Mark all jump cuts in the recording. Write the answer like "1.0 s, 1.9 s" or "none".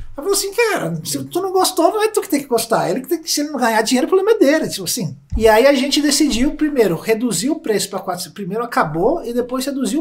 none